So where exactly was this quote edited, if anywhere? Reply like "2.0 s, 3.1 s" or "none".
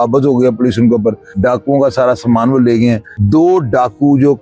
1.3 s, 3.1 s